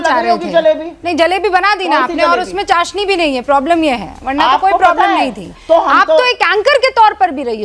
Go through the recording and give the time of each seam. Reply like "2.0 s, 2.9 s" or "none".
5.5 s